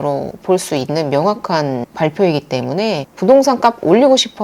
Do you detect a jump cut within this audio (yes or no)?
yes